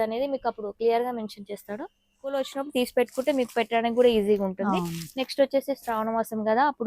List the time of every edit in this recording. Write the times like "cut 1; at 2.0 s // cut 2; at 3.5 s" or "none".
cut 1; at 2.3 s